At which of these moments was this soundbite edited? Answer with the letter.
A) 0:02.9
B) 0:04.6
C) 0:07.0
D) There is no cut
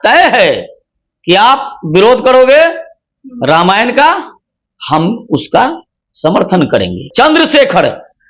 C